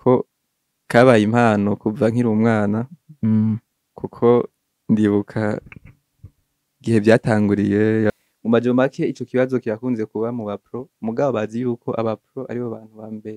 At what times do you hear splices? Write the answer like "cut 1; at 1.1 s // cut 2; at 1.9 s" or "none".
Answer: cut 1; at 8.1 s